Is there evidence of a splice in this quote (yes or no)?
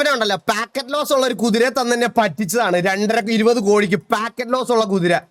no